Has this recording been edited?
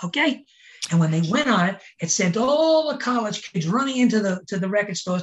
no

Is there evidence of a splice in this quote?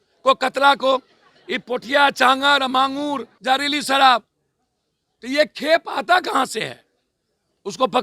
yes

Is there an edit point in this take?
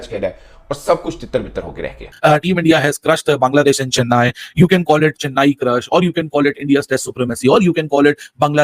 yes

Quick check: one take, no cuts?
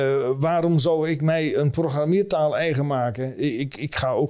yes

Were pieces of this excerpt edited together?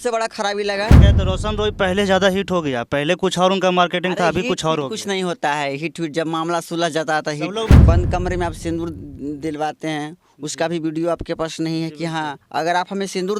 yes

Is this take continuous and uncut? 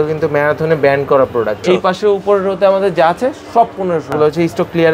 no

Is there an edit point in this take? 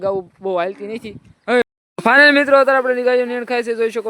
yes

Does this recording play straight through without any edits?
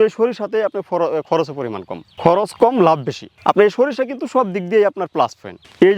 yes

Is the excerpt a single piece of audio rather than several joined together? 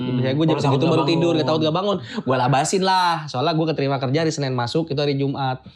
yes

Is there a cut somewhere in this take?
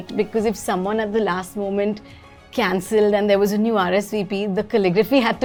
no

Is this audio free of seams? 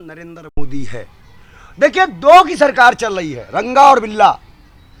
yes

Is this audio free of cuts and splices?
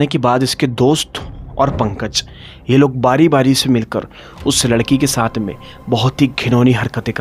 yes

